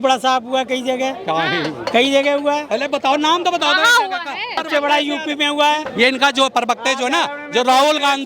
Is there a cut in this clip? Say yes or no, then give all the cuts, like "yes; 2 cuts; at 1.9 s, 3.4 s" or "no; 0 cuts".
yes; 2 cuts; at 4.6 s, 5.9 s